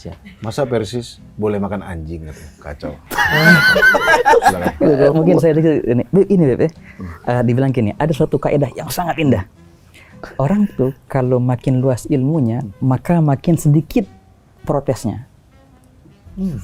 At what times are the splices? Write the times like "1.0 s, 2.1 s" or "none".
none